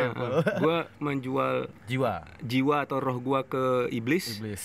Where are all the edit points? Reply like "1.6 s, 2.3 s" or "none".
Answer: 1.8 s